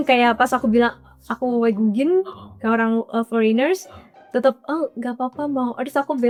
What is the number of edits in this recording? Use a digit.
0